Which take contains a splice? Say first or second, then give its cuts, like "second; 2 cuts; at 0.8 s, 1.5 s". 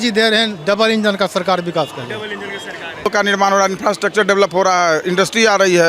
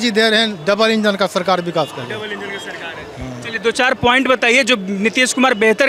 first; 1 cut; at 3.1 s